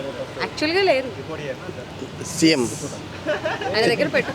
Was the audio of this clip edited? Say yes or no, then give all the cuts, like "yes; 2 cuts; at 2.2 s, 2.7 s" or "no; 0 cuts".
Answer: no; 0 cuts